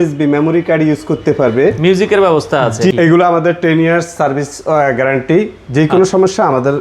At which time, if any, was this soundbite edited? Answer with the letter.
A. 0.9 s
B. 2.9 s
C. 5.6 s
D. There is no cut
B